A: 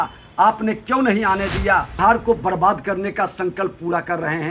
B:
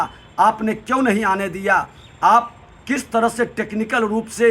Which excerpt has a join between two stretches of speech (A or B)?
A